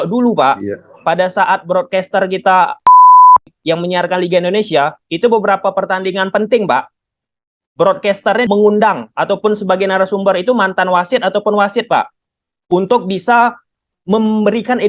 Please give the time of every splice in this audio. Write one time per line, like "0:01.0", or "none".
none